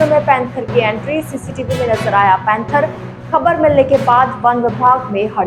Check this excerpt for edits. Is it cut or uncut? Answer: uncut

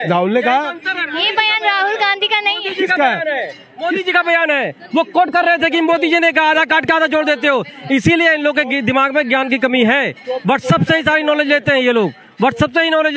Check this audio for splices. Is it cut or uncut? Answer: uncut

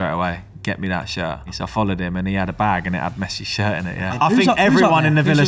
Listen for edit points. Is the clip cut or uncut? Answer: cut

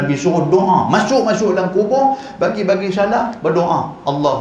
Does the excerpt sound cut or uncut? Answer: uncut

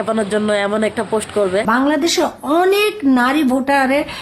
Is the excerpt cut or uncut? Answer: cut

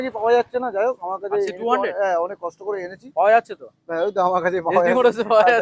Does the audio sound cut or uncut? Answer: uncut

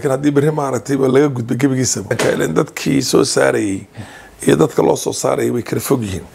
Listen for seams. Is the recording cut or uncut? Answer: cut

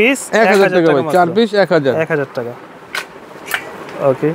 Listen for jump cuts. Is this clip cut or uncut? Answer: uncut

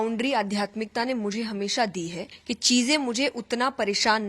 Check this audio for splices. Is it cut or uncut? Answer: cut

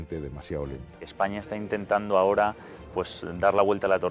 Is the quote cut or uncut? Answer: cut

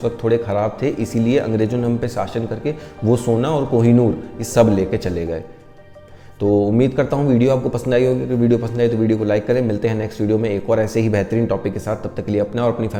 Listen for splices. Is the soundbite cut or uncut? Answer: uncut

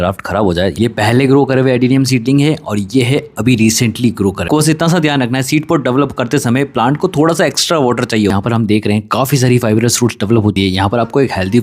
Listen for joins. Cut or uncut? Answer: cut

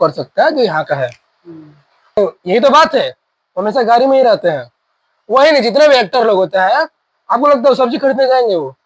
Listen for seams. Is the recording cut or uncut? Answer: cut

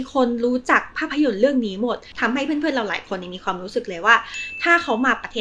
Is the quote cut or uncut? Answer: cut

